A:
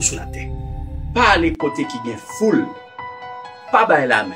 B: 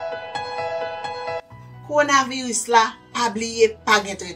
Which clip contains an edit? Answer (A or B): B